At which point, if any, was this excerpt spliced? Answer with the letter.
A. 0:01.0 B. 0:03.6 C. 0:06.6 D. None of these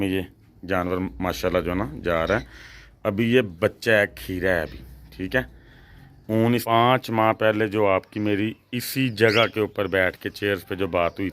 C